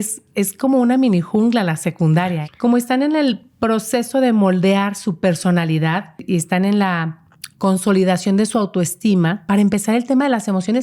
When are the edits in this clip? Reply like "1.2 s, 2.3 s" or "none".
2.4 s, 6.2 s, 9.4 s